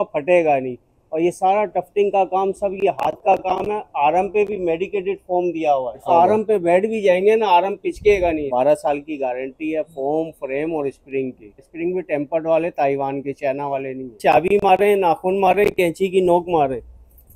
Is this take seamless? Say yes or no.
no